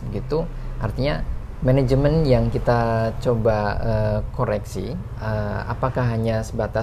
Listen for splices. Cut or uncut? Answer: uncut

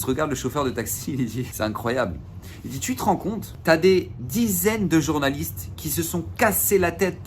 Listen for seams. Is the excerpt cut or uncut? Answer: cut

